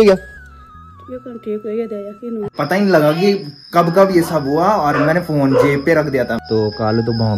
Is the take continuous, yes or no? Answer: no